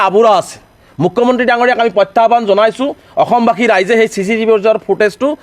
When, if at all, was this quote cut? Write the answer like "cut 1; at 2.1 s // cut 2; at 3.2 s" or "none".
none

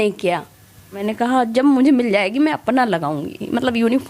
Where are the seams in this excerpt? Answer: cut 1; at 1.1 s

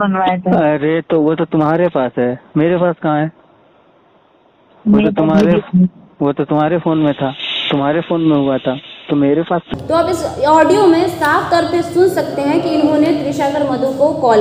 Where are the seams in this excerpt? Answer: none

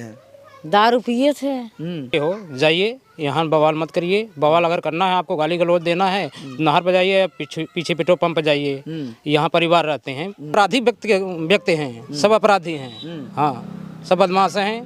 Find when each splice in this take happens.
cut 1; at 2.1 s // cut 2; at 10.5 s

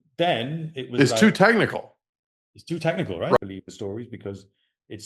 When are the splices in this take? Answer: cut 1; at 3.4 s

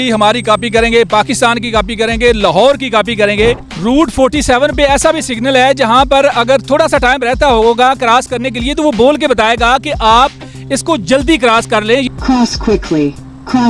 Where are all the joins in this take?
cut 1; at 3.7 s // cut 2; at 12.1 s

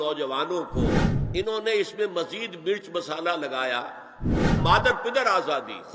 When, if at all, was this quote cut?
cut 1; at 1.1 s // cut 2; at 4.5 s

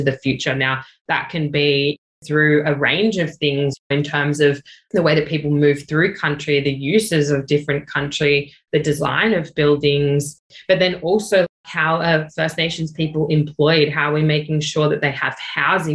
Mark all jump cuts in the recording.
cut 1; at 2.1 s // cut 2; at 3.8 s

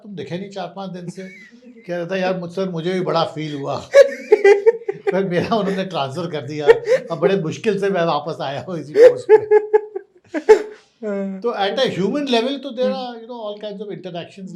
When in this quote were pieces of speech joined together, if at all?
none

